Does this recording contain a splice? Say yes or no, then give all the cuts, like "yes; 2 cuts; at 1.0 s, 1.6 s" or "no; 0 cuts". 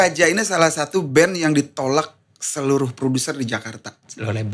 no; 0 cuts